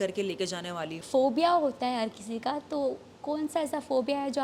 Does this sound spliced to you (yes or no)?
yes